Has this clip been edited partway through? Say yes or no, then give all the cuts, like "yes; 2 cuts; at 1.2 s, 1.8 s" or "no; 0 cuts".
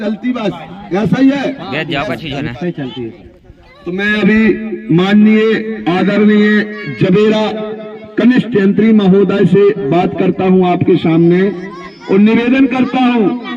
no; 0 cuts